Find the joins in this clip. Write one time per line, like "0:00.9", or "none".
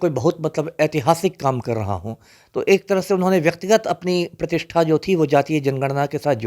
none